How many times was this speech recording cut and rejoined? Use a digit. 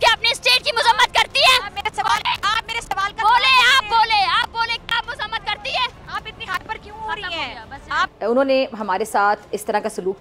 1